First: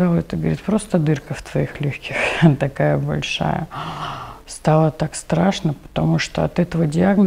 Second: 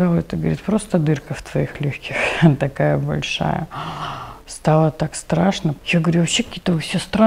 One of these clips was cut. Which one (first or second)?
second